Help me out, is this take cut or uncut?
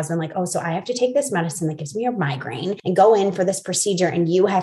cut